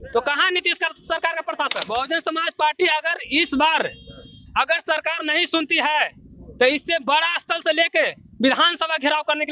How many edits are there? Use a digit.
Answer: 1